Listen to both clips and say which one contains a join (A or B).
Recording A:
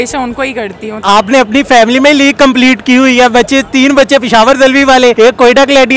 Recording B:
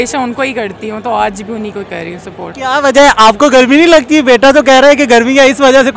A